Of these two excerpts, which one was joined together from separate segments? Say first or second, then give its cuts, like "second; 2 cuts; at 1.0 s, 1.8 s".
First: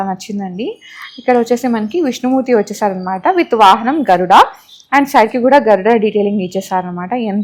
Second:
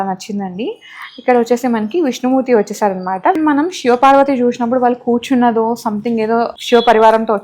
second; 2 cuts; at 3.3 s, 6.6 s